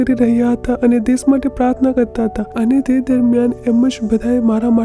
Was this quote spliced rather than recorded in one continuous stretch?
no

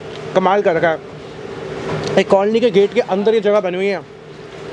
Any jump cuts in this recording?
no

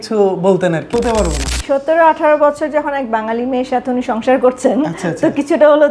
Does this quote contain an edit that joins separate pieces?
yes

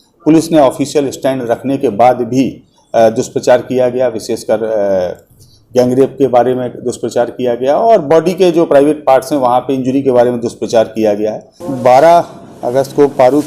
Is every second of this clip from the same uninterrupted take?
no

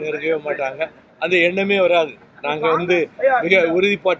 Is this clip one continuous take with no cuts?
yes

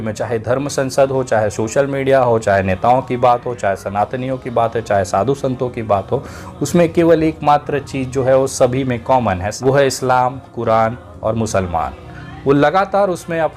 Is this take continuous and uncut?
no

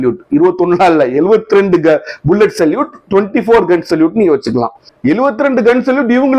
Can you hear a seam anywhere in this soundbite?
yes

